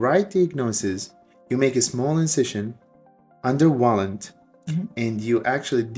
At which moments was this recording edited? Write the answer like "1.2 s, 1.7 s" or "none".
none